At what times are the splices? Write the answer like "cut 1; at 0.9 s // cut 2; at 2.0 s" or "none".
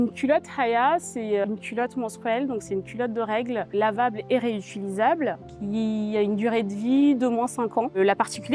cut 1; at 1.4 s // cut 2; at 3.7 s // cut 3; at 5.5 s